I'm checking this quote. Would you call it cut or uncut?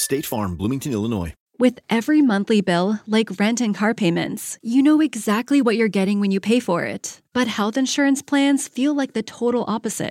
cut